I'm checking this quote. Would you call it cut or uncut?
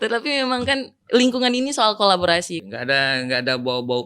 cut